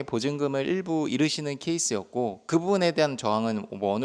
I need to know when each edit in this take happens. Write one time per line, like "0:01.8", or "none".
none